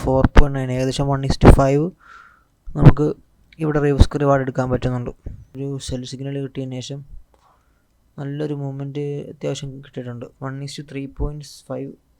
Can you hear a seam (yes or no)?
yes